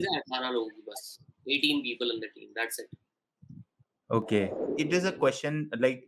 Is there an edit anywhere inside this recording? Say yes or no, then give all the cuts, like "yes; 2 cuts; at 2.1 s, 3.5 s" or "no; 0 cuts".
yes; 1 cut; at 4.6 s